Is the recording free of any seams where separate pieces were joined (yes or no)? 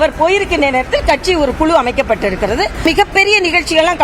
no